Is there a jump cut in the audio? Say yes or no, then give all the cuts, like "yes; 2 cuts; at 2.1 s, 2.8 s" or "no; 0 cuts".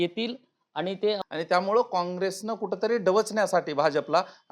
yes; 1 cut; at 1.2 s